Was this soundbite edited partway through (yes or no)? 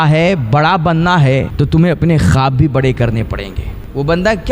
yes